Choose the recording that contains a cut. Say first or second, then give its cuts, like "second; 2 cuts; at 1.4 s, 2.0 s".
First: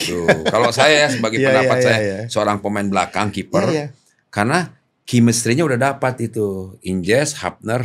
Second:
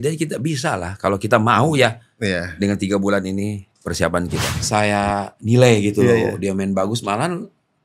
second; 1 cut; at 4.5 s